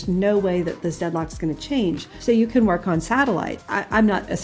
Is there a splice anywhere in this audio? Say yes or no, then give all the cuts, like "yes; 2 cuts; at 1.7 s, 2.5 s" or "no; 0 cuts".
yes; 2 cuts; at 2.1 s, 3.6 s